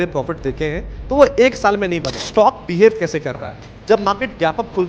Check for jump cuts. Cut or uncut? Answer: cut